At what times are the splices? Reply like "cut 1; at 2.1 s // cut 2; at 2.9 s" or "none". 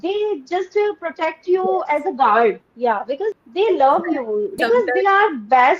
cut 1; at 3.4 s // cut 2; at 4.5 s